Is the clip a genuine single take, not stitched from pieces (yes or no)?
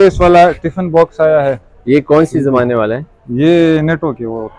yes